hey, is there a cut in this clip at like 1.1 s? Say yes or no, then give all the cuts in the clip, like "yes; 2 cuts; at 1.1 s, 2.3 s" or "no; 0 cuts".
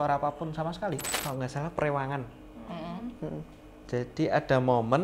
yes; 1 cut; at 1.1 s